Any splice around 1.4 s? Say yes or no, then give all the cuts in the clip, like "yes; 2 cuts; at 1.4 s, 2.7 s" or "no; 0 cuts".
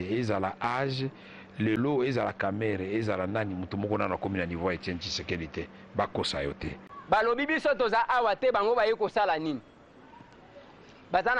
no; 1 cut; at 6.9 s